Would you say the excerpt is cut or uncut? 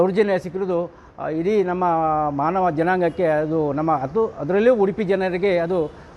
uncut